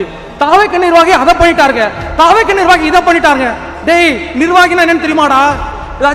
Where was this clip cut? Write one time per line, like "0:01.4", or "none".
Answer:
none